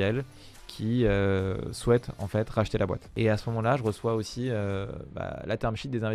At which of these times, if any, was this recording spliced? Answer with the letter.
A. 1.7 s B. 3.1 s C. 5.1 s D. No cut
B